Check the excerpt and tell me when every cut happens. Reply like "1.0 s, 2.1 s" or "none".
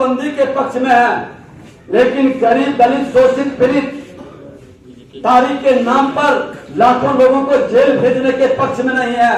none